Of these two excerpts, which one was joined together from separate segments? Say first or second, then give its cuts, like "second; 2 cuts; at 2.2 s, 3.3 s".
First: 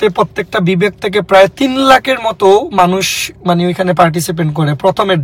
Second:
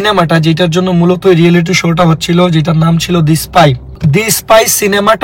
second; 1 cut; at 4.0 s